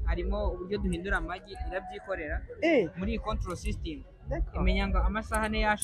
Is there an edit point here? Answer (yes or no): no